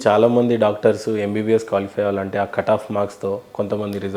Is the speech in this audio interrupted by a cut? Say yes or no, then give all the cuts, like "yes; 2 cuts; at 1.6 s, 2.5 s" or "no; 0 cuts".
no; 0 cuts